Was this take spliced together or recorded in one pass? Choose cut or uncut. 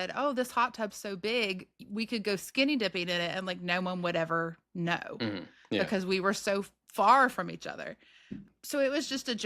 cut